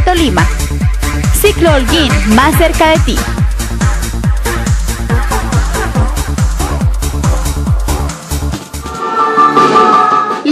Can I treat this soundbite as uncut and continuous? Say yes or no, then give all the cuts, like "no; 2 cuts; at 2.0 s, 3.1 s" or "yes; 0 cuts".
no; 1 cut; at 8.8 s